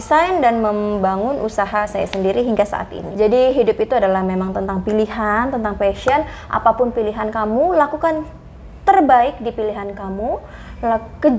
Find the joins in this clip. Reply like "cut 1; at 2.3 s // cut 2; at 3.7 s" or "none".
cut 1; at 3.0 s